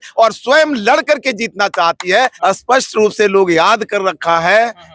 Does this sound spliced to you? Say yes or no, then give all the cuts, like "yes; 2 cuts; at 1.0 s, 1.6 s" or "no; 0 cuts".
yes; 1 cut; at 2.3 s